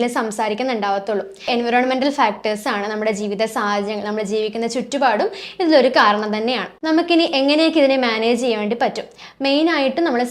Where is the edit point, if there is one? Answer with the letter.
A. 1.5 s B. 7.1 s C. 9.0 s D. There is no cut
A